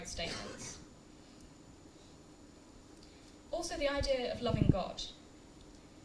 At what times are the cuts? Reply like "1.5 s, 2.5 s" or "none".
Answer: none